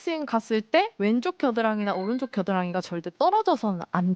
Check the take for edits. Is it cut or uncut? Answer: cut